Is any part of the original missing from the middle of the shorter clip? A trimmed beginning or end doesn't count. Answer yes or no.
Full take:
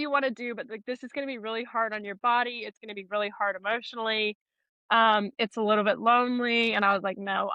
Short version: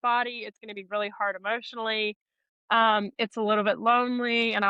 no